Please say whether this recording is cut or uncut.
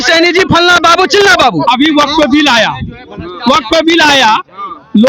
cut